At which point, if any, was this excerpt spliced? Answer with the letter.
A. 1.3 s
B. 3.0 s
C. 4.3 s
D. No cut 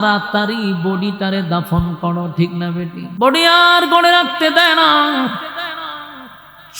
B